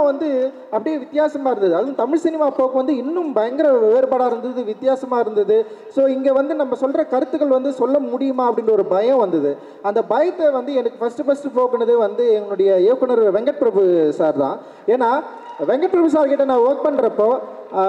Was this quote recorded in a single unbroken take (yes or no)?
yes